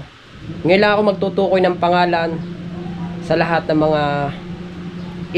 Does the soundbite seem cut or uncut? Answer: uncut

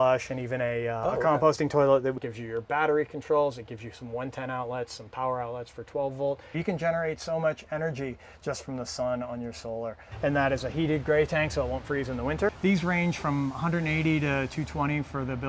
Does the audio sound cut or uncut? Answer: cut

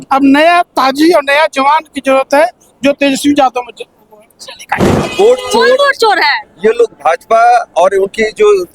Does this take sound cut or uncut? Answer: cut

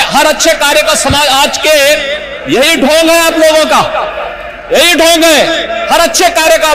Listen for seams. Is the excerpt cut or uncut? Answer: uncut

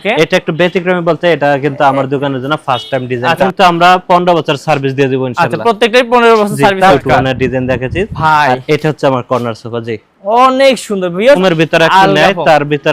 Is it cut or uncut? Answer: cut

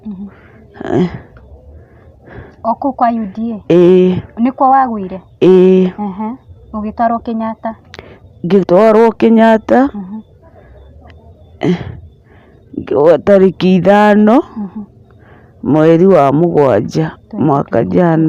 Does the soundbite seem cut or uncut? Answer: uncut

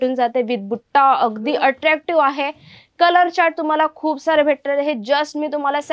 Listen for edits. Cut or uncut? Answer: uncut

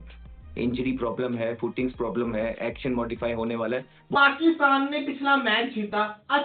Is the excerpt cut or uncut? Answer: cut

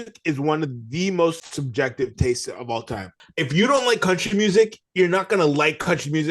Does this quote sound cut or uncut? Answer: cut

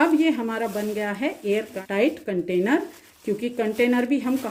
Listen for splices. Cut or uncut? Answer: uncut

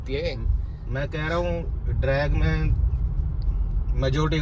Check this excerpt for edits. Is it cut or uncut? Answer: uncut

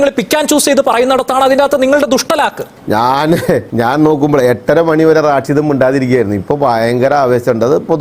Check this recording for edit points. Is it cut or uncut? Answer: cut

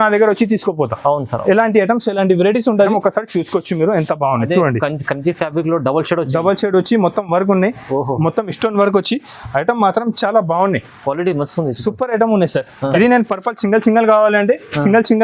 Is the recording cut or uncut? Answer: cut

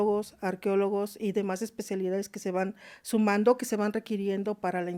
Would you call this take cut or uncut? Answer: uncut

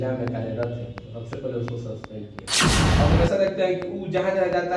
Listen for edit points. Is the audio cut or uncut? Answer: cut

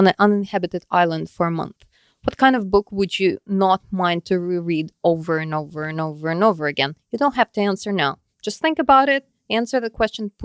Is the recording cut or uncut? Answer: uncut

